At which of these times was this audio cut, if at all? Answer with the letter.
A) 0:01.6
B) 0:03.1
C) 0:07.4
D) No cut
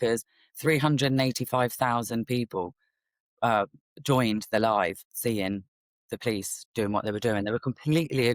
D